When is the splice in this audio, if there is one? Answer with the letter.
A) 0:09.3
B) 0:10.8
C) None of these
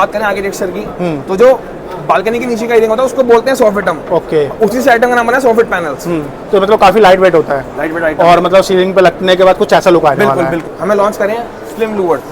B